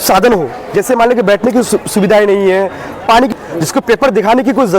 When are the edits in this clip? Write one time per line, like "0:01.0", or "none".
0:03.3